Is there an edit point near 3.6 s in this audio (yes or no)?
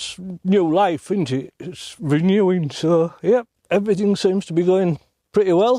yes